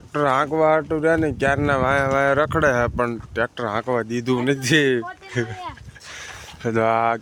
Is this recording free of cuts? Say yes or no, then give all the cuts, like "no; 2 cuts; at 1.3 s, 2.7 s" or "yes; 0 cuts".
yes; 0 cuts